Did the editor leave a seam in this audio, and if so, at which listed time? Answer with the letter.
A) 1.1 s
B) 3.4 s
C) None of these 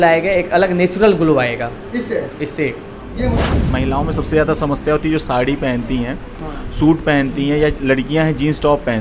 B